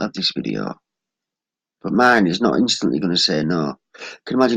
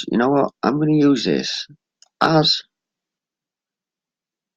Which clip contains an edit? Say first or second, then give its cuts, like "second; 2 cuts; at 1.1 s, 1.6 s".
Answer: second; 1 cut; at 1.6 s